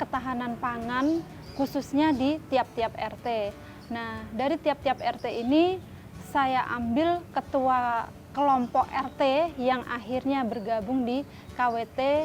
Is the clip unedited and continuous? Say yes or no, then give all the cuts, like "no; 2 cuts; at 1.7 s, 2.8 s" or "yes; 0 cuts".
yes; 0 cuts